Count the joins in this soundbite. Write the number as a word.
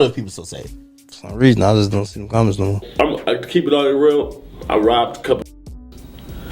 two